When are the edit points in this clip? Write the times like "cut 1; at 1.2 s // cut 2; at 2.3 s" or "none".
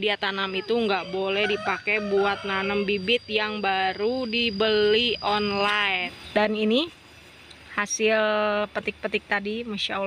cut 1; at 6.2 s